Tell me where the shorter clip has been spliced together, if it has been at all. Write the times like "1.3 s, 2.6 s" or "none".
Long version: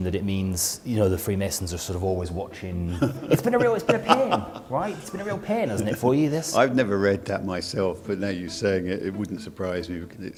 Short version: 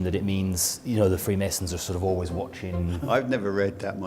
3.0 s